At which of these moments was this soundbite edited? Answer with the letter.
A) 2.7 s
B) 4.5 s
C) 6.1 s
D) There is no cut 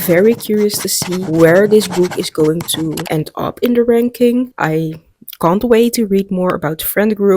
B